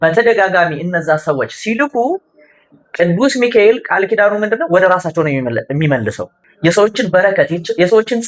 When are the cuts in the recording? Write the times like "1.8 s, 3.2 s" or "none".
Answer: 6.3 s